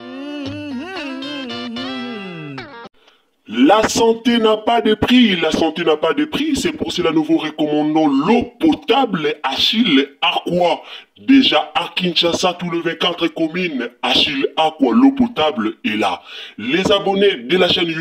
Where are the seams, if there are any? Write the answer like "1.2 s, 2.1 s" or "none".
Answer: 2.8 s